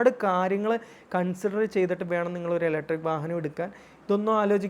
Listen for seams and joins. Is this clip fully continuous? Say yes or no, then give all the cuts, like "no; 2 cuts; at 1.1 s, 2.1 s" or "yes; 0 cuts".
yes; 0 cuts